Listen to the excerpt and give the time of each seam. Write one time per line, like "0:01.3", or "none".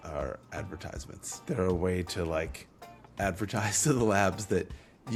none

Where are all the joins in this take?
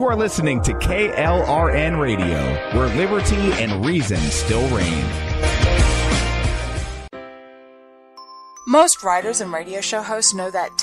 0:07.1

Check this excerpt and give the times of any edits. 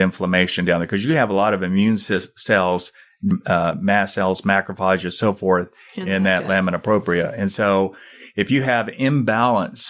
none

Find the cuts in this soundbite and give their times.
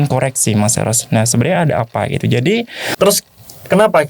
0:02.8

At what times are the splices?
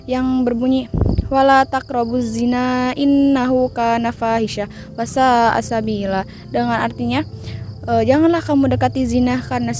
none

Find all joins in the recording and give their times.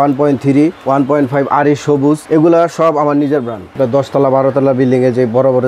0:03.7

